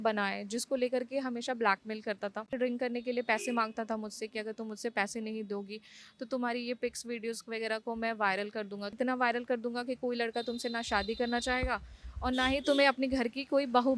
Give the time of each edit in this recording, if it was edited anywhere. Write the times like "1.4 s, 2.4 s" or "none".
2.5 s, 8.9 s